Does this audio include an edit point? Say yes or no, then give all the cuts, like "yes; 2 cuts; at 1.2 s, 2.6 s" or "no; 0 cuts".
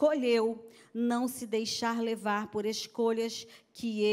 no; 0 cuts